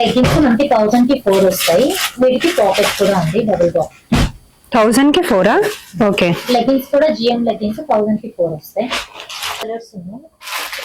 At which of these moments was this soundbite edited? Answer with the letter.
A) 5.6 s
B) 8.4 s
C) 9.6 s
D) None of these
C